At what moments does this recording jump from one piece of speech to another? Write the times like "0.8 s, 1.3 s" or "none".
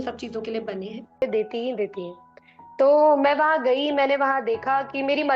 1.2 s